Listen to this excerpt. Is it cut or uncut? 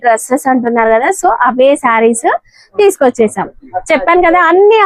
uncut